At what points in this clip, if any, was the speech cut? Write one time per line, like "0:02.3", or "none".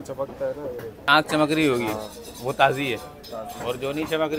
0:01.1

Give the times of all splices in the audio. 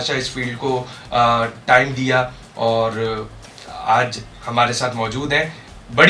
none

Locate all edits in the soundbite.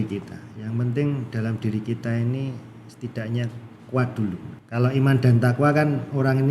0:04.5

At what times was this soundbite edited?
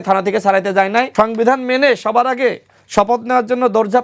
0:01.1

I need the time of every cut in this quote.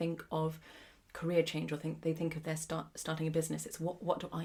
none

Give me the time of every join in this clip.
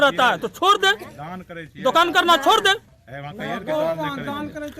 none

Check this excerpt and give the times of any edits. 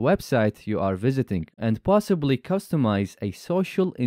0:01.5

